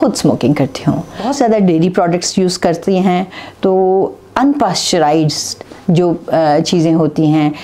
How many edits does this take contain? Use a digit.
1